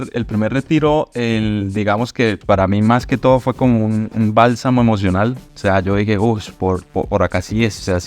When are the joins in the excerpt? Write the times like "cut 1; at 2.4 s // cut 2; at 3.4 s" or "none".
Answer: cut 1; at 2.4 s